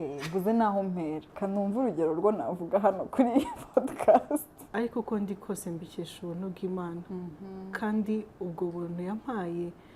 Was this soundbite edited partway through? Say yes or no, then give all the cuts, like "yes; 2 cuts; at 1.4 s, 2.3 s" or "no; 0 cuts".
yes; 1 cut; at 4.6 s